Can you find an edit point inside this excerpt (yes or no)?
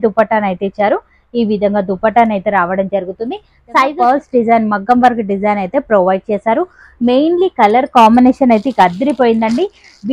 yes